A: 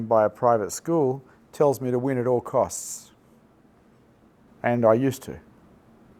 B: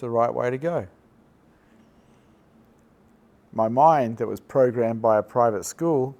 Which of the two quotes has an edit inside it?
A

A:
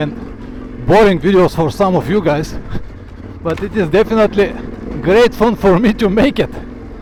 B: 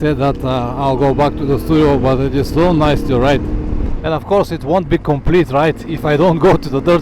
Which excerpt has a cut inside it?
B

